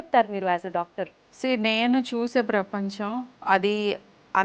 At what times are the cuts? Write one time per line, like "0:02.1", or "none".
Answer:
0:01.2
0:03.3